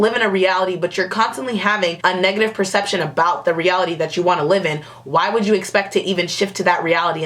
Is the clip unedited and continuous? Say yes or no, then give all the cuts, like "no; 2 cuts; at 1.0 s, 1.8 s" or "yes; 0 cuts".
yes; 0 cuts